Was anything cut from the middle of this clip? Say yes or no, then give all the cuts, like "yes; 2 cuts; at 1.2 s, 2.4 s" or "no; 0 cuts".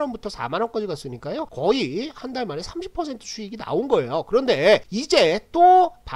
yes; 2 cuts; at 1.5 s, 4.9 s